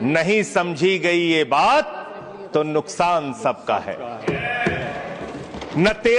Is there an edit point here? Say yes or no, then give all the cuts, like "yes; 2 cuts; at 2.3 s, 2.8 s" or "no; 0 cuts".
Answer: no; 0 cuts